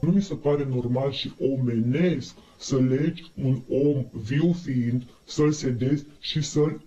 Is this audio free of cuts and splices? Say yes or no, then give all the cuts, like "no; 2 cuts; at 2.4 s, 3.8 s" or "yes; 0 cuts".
yes; 0 cuts